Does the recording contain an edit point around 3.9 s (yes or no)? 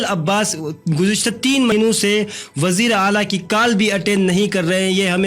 no